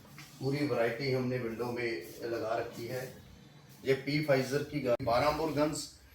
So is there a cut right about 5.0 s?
yes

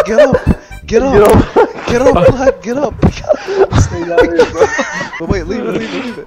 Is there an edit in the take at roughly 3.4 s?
no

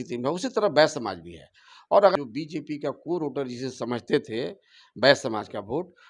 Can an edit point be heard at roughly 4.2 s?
no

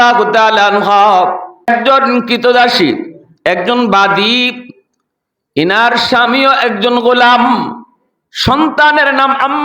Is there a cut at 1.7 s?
yes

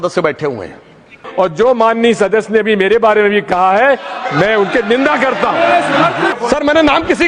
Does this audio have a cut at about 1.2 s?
yes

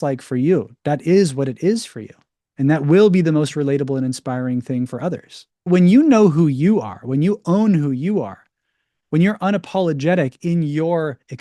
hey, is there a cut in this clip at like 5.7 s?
yes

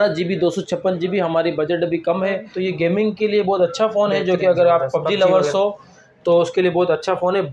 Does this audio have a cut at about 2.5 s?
yes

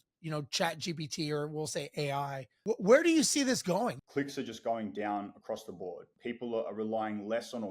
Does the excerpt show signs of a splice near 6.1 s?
yes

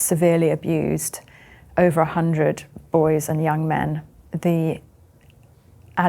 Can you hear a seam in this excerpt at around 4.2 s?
yes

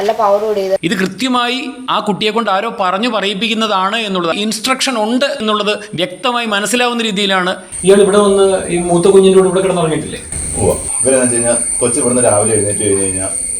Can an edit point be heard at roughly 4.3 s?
yes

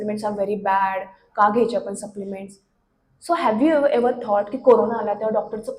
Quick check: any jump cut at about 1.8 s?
no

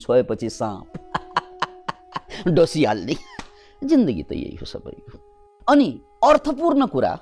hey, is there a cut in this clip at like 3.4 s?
no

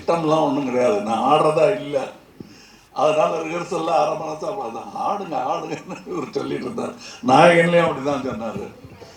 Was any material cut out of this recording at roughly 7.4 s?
no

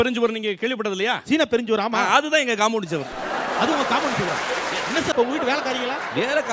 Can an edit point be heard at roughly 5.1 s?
yes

